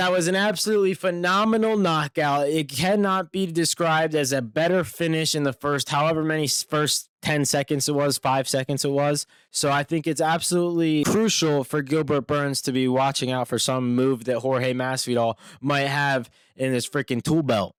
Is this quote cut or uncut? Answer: uncut